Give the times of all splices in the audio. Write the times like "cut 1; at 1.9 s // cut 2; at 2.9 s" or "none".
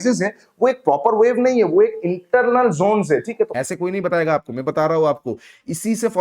cut 1; at 3.5 s

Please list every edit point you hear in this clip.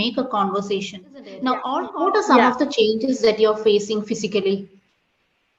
cut 1; at 1.9 s

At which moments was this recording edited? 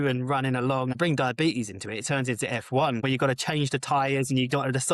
cut 1; at 0.9 s // cut 2; at 3.0 s

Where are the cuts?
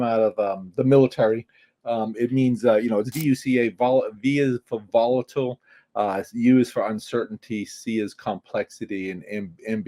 none

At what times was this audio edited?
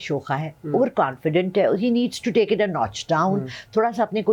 none

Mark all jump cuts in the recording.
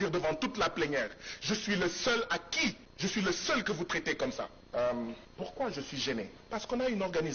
cut 1; at 2.9 s // cut 2; at 4.6 s // cut 3; at 5.3 s // cut 4; at 6.4 s

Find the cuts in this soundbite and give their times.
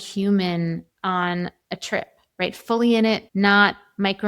cut 1; at 0.9 s // cut 2; at 3.3 s

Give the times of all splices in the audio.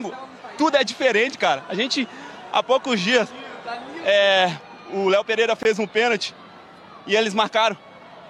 none

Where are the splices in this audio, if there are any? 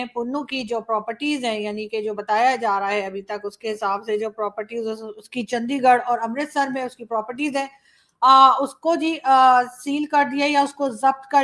none

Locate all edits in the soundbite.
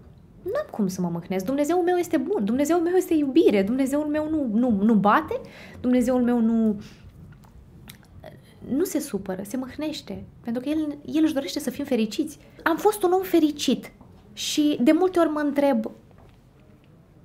cut 1; at 12.5 s

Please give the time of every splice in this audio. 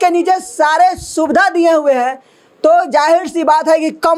none

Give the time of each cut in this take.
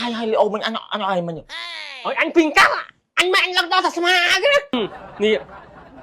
cut 1; at 4.7 s

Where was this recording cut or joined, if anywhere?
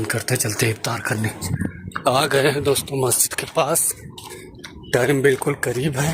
cut 1; at 1.4 s

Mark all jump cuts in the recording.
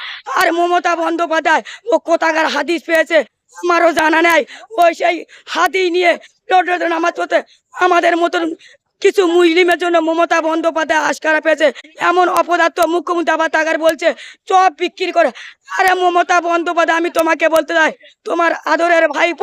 cut 1; at 11.9 s

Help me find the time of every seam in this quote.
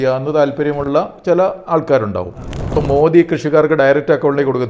cut 1; at 2.7 s

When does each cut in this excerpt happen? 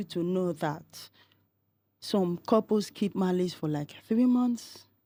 none

